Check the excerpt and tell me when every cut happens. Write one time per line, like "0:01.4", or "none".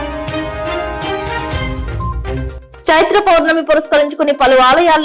0:01.1
0:02.4